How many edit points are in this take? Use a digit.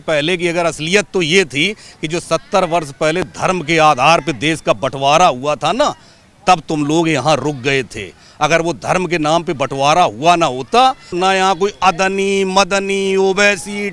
1